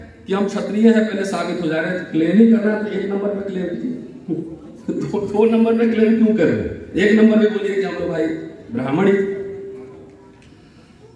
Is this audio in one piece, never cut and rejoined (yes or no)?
yes